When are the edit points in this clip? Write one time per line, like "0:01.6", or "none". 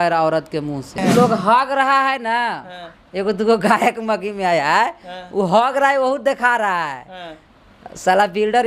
0:01.0